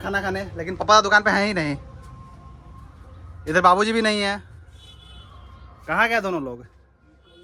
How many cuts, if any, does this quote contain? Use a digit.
0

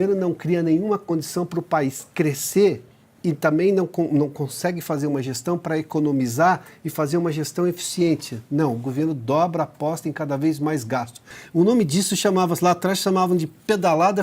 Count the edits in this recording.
1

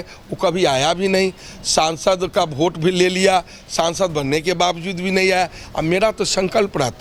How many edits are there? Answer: 0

